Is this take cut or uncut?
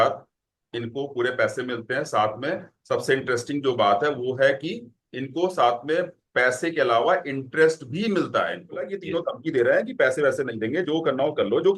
cut